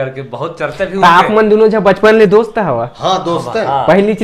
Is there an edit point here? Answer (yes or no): no